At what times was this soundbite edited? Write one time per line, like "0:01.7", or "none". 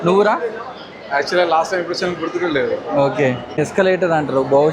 0:03.5

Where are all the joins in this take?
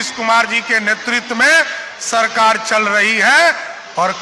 none

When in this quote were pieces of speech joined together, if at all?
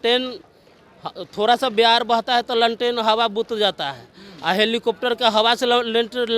none

